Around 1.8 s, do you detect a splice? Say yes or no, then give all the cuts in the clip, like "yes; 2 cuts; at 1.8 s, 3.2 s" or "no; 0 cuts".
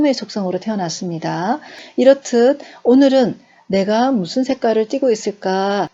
yes; 1 cut; at 1.8 s